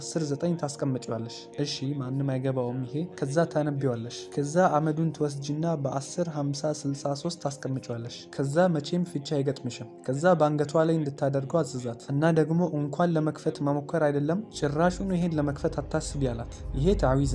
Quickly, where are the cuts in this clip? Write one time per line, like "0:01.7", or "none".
none